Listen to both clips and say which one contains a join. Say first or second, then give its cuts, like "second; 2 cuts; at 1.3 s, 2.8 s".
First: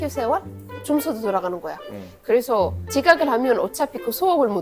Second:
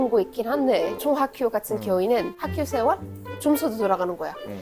second; 1 cut; at 0.9 s